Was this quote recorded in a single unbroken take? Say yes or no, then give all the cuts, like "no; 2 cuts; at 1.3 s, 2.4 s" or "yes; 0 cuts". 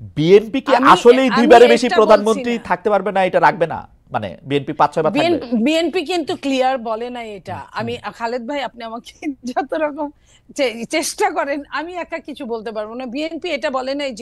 yes; 0 cuts